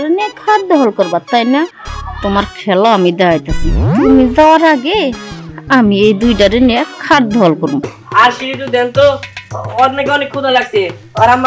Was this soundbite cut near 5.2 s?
no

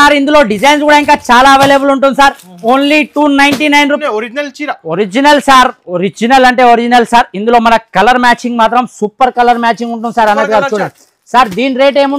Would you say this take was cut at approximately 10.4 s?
no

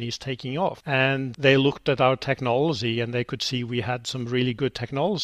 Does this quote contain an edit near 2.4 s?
no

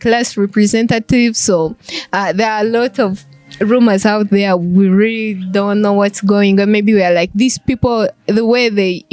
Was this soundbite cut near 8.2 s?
no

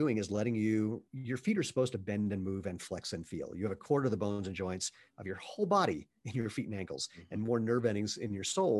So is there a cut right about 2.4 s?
no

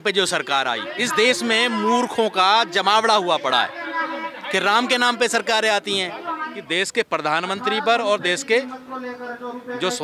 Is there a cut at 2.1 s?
no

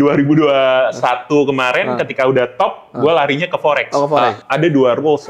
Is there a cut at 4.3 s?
yes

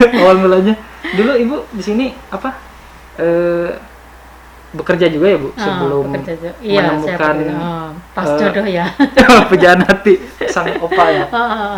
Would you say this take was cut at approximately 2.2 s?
no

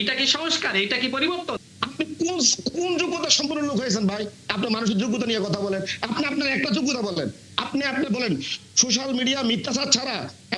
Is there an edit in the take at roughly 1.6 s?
yes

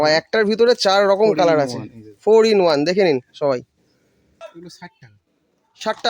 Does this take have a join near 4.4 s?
yes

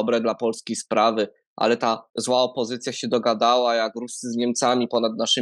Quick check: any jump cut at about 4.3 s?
no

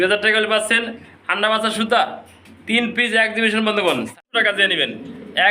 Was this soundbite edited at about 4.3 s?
yes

